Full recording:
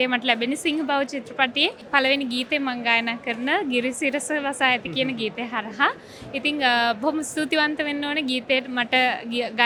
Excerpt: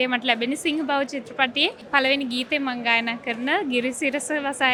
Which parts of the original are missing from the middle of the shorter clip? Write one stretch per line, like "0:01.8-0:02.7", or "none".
none